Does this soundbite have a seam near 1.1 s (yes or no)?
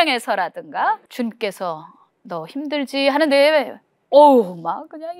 yes